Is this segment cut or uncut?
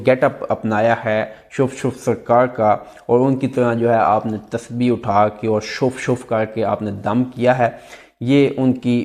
uncut